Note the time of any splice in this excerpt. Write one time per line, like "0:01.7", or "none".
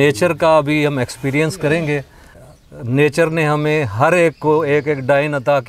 0:02.5